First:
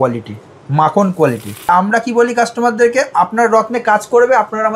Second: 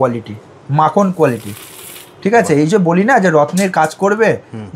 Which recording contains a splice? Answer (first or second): first